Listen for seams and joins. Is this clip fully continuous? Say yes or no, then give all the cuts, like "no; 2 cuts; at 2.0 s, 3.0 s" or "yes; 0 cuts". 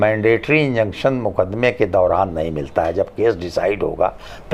yes; 0 cuts